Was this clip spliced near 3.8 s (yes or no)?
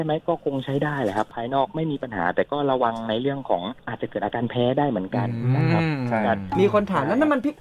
yes